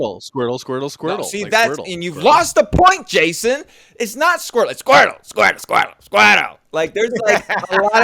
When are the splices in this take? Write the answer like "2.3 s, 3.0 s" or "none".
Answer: 1.3 s, 4.8 s